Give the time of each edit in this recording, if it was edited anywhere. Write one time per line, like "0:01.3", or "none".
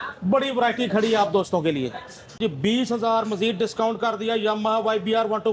0:02.4